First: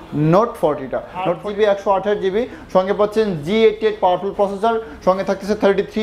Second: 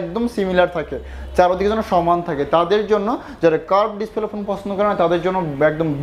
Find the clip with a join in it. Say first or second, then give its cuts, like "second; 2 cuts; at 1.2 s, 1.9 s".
first; 1 cut; at 1.4 s